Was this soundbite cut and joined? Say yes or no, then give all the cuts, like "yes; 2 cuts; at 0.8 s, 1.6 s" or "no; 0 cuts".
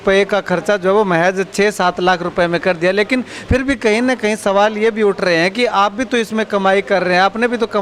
no; 0 cuts